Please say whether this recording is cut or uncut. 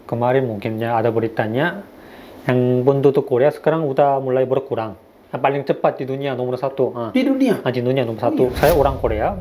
cut